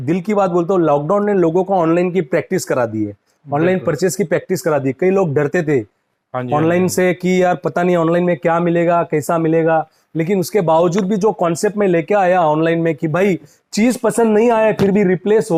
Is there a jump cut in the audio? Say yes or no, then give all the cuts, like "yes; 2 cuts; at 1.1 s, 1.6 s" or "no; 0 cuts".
no; 0 cuts